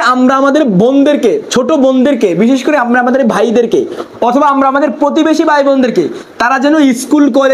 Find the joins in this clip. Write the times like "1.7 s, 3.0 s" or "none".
none